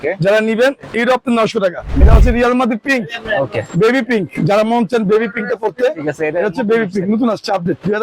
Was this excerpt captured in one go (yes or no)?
no